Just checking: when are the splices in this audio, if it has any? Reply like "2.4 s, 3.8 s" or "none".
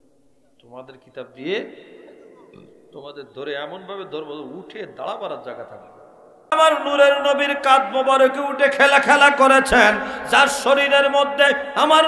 6.5 s